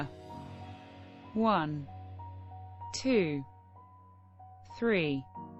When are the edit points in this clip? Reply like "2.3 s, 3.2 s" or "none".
none